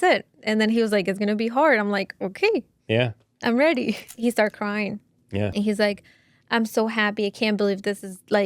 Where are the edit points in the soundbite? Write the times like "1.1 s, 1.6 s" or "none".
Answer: 4.0 s, 5.5 s

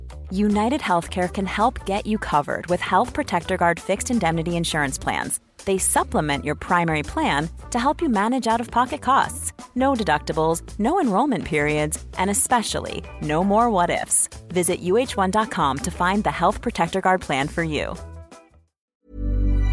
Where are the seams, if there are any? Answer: 18.8 s

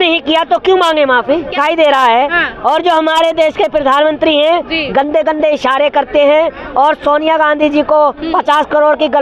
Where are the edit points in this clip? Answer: 1.6 s

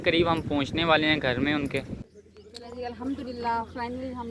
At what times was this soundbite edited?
2.1 s

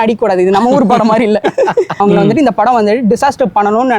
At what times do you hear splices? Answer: 2.0 s

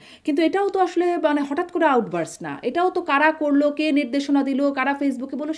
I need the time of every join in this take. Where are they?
none

